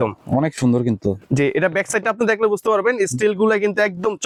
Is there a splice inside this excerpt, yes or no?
no